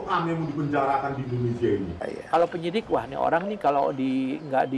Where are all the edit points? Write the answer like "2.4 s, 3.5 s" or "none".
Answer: 2.1 s